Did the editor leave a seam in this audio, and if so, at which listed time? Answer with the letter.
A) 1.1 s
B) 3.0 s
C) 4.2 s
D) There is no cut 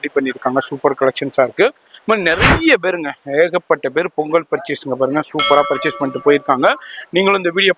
D